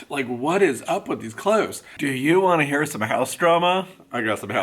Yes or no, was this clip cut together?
yes